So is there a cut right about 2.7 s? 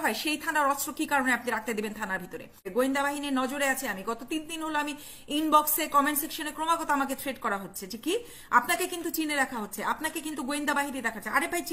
yes; 1 cut; at 2.7 s

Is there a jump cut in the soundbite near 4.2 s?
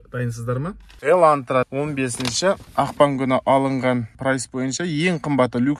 yes; 4 cuts; at 0.9 s, 1.7 s, 2.7 s, 4.2 s

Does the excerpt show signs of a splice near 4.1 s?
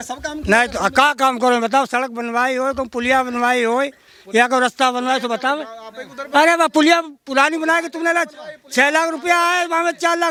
no; 0 cuts

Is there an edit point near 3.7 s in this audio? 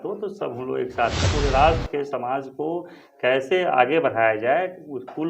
no; 1 cut; at 1.3 s

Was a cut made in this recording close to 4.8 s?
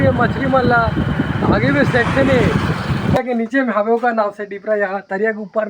no; 1 cut; at 3.2 s

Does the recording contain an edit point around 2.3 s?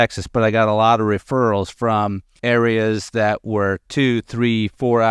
yes; 1 cut; at 2.3 s

